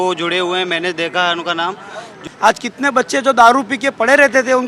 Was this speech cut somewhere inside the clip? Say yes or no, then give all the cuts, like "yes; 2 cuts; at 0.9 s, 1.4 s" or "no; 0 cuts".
yes; 1 cut; at 2.2 s